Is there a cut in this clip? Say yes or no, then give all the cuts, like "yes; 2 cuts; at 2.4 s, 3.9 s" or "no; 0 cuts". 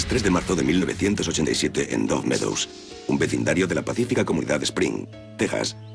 yes; 1 cut; at 3.9 s